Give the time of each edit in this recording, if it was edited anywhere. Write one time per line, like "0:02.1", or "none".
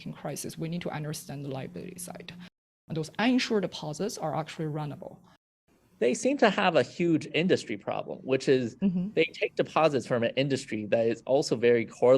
0:02.7
0:05.4